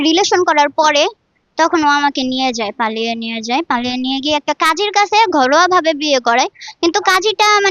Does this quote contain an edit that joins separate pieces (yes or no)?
no